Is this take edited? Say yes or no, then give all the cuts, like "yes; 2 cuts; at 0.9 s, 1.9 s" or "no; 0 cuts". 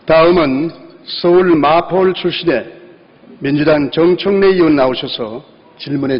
no; 0 cuts